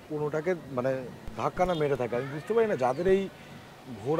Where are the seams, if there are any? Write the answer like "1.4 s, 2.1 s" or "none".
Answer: none